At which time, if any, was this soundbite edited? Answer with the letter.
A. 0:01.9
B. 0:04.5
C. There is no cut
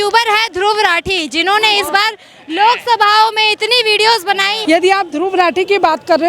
B